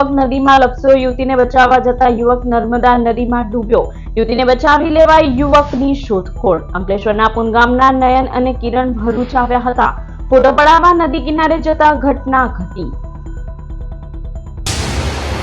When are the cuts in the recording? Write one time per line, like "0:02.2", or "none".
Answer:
0:14.5